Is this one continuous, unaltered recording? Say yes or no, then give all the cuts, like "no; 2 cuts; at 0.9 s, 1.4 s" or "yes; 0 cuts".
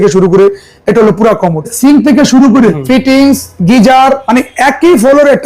no; 3 cuts; at 1.7 s, 2.8 s, 4.2 s